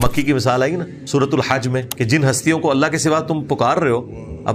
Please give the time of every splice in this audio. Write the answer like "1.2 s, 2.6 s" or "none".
0.9 s, 1.9 s